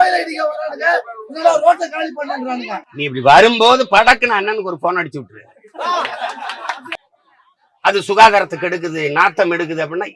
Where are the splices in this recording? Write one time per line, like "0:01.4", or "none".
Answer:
0:07.0